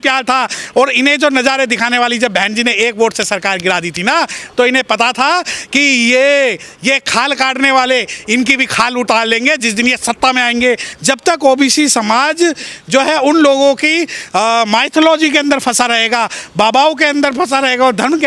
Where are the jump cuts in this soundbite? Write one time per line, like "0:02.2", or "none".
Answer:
0:10.9